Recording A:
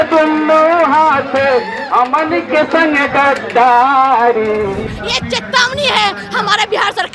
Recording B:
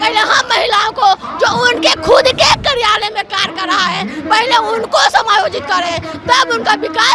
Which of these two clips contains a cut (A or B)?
A